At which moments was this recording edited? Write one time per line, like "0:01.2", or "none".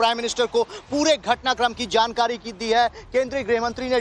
0:03.0